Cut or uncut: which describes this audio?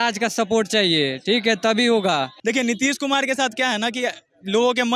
cut